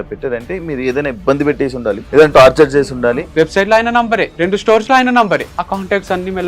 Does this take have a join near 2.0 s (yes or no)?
yes